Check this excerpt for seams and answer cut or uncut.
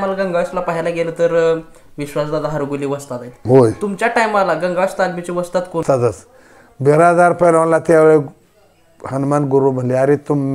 cut